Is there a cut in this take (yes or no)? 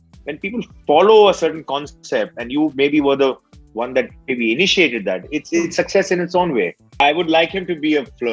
yes